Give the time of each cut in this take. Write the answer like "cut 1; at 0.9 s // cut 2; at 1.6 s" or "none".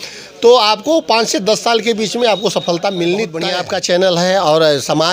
none